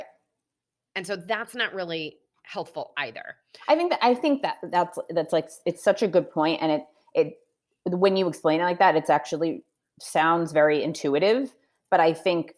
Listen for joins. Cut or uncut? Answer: uncut